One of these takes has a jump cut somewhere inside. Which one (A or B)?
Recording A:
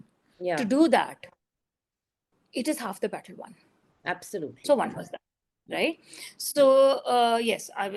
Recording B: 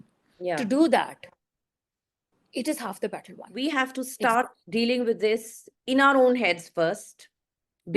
B